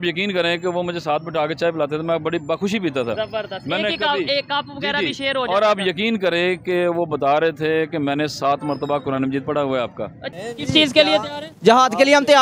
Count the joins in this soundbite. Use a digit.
1